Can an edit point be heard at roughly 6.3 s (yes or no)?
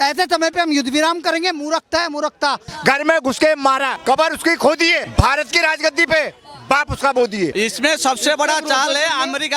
no